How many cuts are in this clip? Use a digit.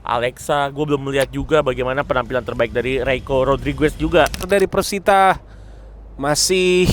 1